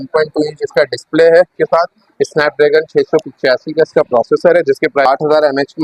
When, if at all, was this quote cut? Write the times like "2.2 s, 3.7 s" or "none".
1.6 s, 5.1 s